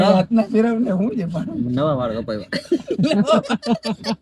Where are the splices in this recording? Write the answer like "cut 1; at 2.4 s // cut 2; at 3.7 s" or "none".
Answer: cut 1; at 2.9 s